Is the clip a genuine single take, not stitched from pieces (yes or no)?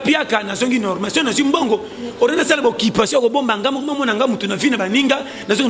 yes